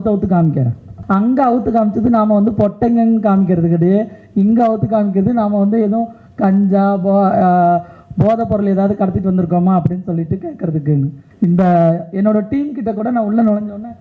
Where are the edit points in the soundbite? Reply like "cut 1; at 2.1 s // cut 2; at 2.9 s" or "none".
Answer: cut 1; at 1.0 s // cut 2; at 11.2 s